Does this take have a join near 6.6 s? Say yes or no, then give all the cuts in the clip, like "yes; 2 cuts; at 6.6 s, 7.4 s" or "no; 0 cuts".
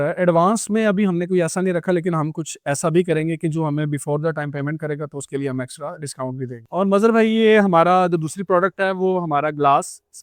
yes; 1 cut; at 6.6 s